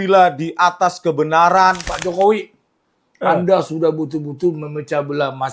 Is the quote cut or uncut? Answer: cut